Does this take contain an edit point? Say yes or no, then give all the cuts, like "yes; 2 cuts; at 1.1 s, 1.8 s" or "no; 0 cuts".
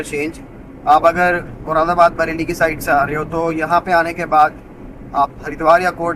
no; 0 cuts